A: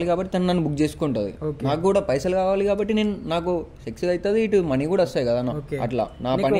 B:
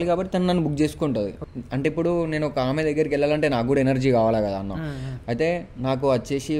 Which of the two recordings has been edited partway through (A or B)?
B